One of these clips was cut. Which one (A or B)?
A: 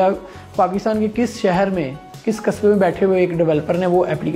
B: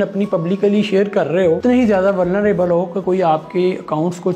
B